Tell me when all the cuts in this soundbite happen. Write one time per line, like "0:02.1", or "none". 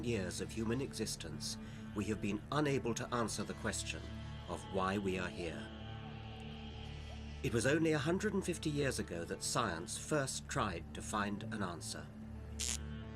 0:05.2